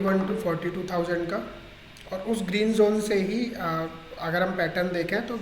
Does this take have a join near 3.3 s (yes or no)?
yes